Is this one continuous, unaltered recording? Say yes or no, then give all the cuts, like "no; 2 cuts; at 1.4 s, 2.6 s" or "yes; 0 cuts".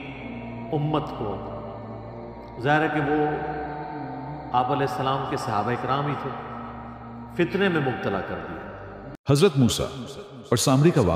no; 1 cut; at 9.0 s